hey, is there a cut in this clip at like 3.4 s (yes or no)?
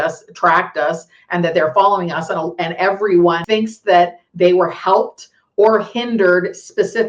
yes